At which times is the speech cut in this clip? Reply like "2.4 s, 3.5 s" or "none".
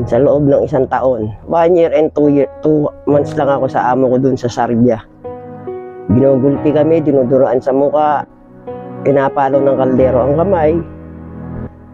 none